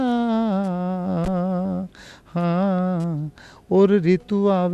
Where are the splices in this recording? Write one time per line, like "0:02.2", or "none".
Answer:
none